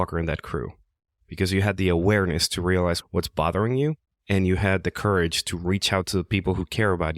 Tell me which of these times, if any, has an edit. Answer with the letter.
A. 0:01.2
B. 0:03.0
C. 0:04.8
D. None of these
B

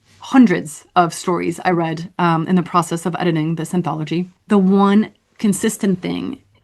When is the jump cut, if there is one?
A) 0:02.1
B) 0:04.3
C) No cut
B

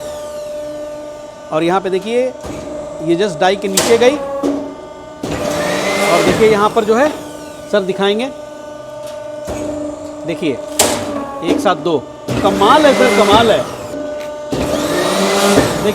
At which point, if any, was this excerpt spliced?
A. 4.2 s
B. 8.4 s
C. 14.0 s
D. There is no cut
C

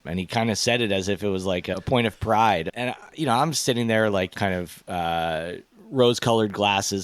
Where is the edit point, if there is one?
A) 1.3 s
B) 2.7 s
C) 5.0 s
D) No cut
B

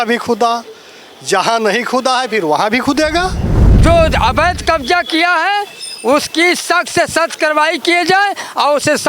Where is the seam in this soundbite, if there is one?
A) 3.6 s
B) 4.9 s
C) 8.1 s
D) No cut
A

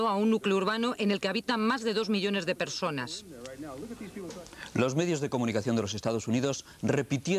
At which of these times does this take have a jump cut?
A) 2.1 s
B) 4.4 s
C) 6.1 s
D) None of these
B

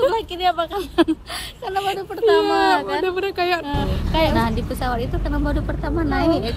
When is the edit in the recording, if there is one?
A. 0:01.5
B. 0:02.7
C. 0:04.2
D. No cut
C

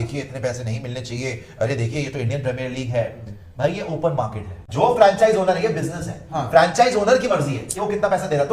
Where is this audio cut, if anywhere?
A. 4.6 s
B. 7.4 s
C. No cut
A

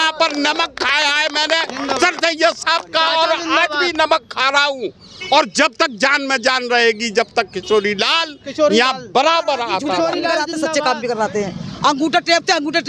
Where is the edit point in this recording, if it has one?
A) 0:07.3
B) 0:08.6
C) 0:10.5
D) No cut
C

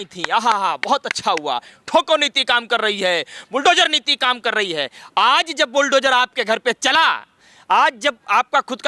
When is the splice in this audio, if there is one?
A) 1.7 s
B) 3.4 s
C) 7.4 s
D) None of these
D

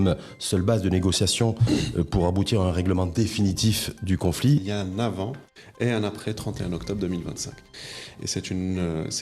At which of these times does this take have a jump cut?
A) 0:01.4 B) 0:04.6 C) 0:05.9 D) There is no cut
B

